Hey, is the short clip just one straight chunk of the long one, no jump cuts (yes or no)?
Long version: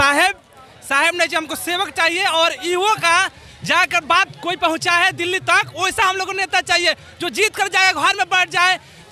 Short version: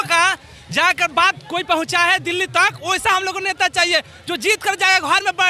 yes